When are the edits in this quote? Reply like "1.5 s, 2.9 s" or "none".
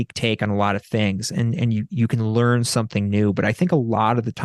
none